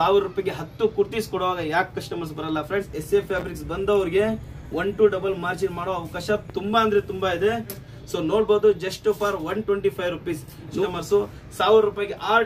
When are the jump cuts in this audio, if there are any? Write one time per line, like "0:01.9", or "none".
0:03.0
0:07.9
0:10.8